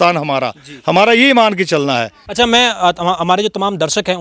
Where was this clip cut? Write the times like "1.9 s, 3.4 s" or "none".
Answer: 2.2 s

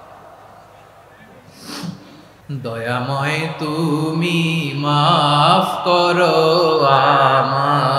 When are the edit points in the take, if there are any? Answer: 2.3 s

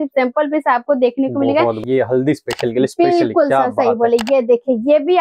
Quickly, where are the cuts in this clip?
1.8 s

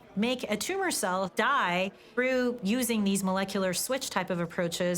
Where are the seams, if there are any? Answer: 1.3 s

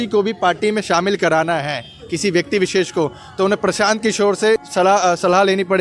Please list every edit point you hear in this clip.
none

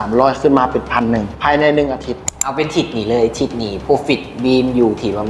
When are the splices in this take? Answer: 1.3 s, 2.4 s

